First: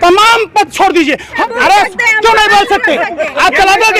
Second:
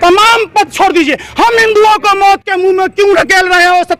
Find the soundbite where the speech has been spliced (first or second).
first